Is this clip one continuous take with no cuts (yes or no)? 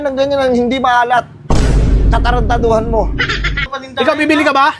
no